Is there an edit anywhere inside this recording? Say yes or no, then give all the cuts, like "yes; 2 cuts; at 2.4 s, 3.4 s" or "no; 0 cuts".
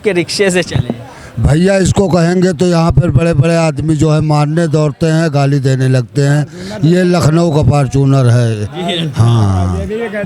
no; 0 cuts